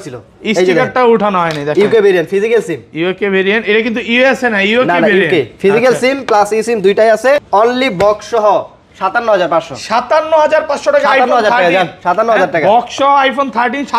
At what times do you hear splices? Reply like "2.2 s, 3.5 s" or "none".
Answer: 7.4 s